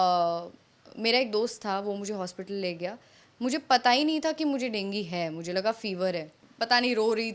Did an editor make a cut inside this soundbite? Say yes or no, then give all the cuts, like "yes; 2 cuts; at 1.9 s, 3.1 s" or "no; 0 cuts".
yes; 1 cut; at 6.4 s